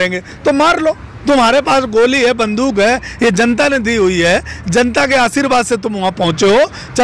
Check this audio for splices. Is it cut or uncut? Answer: uncut